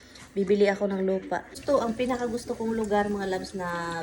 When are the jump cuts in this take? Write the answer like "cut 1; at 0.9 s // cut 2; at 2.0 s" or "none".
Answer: cut 1; at 1.5 s